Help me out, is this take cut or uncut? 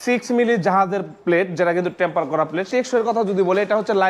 cut